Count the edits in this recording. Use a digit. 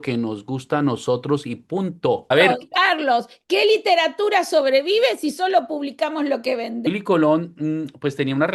2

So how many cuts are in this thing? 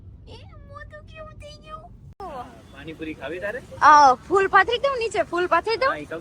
1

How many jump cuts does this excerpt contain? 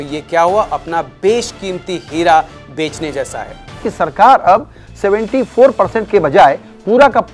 1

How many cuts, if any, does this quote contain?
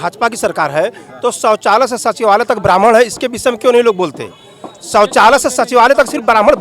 0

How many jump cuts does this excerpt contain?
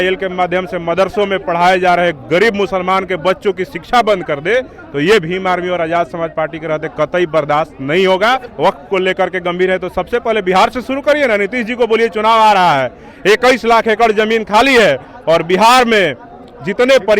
1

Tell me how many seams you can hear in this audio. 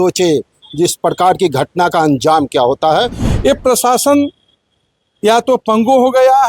1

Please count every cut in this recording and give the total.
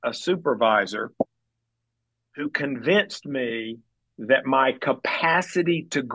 0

